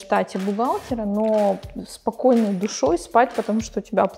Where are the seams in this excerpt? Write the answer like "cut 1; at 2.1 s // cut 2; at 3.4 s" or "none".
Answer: none